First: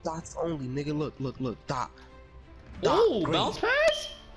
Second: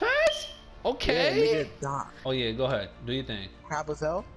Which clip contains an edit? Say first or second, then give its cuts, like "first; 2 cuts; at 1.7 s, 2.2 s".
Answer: second; 1 cut; at 2.1 s